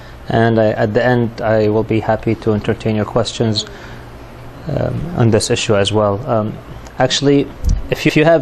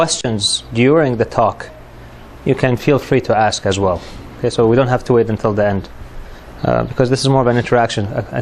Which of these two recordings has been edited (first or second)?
second